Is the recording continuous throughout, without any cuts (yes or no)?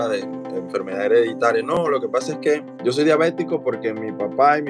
no